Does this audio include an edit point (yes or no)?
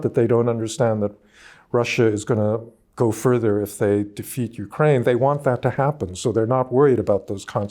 yes